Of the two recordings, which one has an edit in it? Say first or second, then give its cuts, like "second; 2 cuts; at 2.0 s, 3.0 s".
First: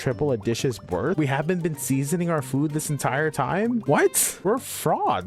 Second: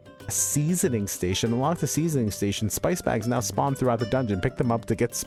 first; 2 cuts; at 1.2 s, 4.0 s